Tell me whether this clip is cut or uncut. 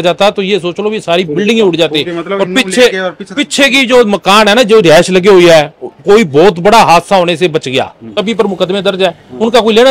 cut